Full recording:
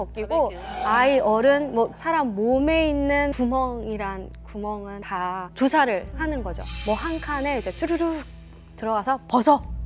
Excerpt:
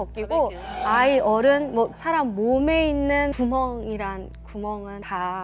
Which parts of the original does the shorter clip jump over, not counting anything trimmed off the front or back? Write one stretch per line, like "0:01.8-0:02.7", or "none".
none